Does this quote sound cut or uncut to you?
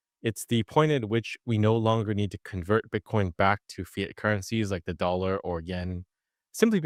uncut